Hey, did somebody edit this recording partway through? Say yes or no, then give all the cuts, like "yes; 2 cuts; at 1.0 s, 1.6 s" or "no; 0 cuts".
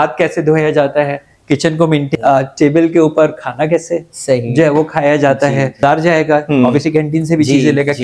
yes; 2 cuts; at 2.1 s, 5.8 s